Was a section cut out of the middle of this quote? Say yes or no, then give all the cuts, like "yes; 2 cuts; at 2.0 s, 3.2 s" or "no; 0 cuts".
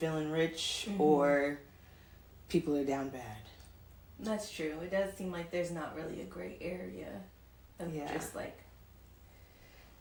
no; 0 cuts